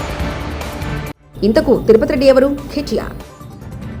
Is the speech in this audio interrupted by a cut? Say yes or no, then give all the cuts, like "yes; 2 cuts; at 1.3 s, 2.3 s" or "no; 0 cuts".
no; 0 cuts